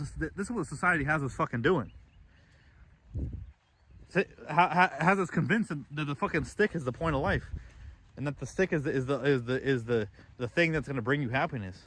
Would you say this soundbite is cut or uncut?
uncut